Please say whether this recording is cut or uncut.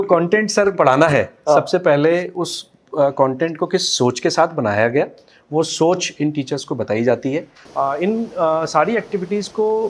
cut